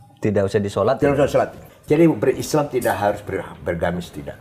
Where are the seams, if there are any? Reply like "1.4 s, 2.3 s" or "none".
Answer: 1.6 s